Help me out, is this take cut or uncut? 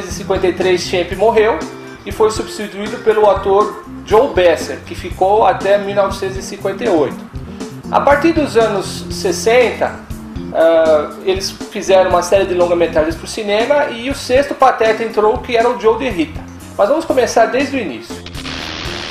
cut